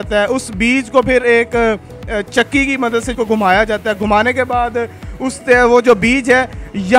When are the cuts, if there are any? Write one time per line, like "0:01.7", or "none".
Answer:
none